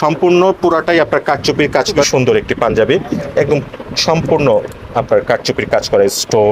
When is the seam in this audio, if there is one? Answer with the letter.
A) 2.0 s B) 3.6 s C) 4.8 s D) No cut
A